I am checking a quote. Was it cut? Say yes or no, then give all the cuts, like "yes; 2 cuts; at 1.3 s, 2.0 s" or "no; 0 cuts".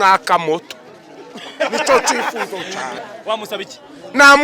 yes; 1 cut; at 3.0 s